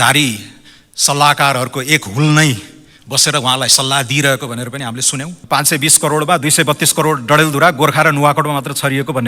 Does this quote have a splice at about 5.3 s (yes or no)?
yes